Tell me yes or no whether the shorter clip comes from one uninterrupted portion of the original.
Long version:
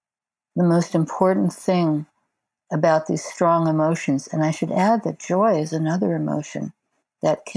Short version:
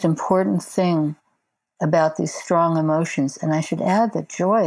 yes